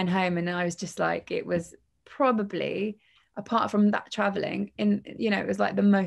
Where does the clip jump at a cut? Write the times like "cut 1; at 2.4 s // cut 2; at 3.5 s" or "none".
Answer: none